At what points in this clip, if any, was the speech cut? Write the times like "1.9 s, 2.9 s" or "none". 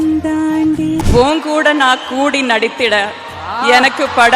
1.1 s

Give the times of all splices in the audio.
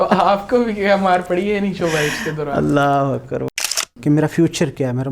3.5 s

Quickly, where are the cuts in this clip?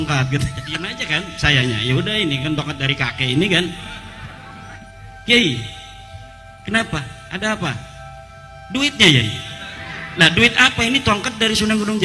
1.0 s, 4.8 s

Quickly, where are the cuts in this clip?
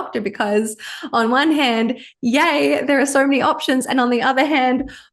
none

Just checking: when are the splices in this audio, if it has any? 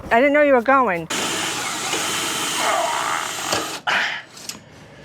1.1 s

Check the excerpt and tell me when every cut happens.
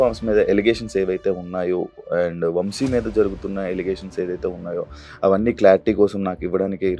none

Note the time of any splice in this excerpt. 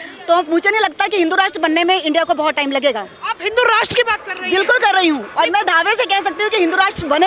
none

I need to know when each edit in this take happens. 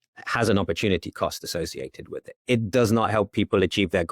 2.4 s

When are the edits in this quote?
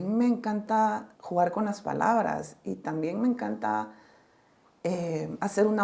1.1 s

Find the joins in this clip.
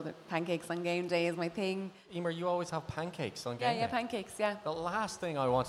2.1 s

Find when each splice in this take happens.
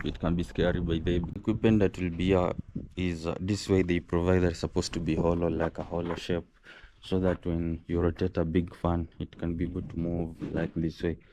1.4 s

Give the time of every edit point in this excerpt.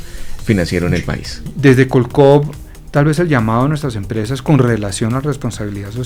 1.4 s

